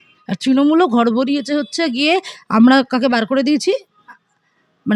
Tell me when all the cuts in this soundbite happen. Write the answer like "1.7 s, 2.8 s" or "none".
none